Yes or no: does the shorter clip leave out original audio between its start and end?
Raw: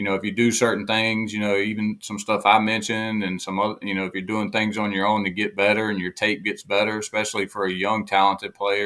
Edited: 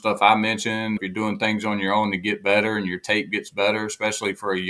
yes